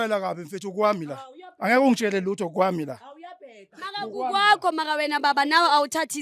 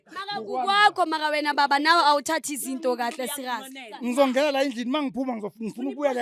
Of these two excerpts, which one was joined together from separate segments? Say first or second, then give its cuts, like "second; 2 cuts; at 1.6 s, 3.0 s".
second; 1 cut; at 3.9 s